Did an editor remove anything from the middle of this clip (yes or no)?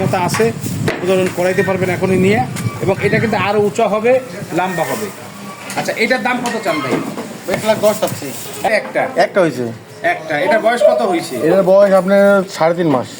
yes